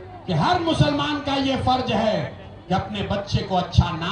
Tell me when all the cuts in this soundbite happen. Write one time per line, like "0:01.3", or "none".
none